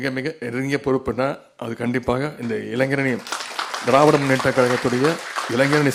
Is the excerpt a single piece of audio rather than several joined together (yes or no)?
yes